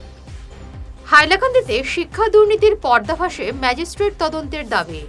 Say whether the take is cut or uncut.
cut